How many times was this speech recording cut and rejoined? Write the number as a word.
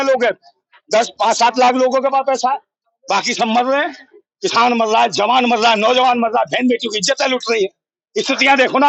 zero